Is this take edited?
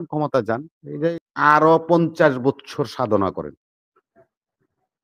yes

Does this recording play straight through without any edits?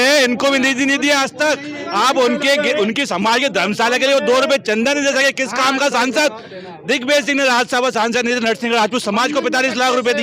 no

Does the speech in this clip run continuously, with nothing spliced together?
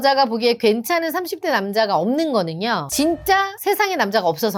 yes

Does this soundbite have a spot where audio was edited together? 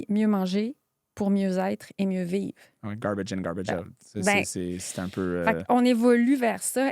no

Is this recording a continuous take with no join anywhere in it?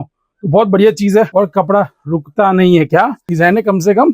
no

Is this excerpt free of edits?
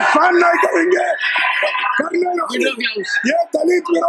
yes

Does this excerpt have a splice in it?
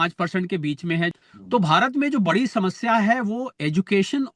yes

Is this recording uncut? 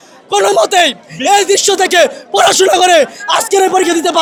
yes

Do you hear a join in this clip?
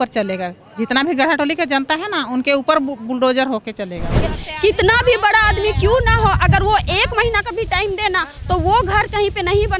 yes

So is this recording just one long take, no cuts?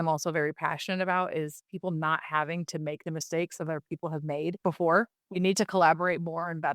no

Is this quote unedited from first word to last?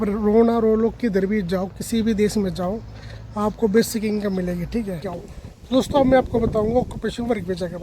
no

